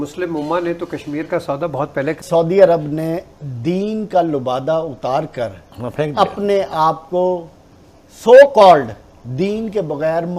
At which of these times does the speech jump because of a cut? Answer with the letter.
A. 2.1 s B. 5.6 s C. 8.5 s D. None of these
A